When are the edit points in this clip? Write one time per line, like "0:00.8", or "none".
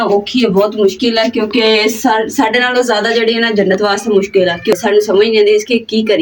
0:04.7